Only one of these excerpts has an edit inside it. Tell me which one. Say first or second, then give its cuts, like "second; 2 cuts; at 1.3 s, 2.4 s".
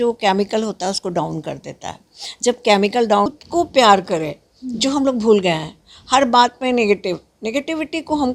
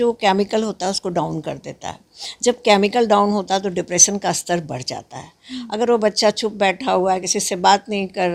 first; 1 cut; at 3.3 s